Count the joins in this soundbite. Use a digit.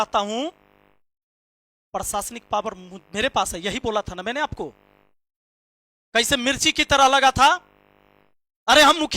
0